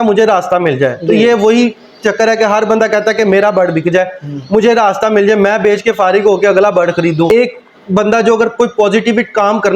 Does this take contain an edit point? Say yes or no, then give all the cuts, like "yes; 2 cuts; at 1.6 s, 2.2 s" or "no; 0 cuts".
yes; 1 cut; at 7.3 s